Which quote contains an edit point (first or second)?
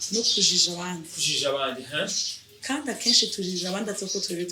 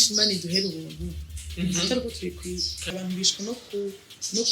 second